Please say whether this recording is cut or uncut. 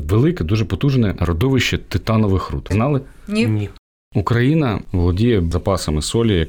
cut